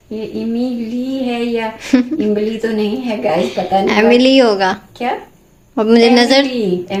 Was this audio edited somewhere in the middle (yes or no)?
no